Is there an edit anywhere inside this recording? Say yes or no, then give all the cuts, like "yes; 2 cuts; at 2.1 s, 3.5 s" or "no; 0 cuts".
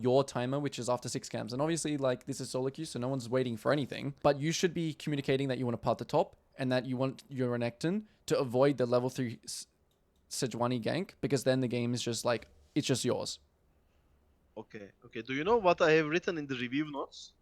yes; 1 cut; at 4.1 s